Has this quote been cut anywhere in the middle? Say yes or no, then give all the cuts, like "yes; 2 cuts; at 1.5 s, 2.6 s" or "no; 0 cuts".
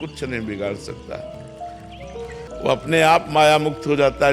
yes; 1 cut; at 2.6 s